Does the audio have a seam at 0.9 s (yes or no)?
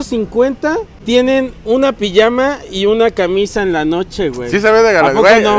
yes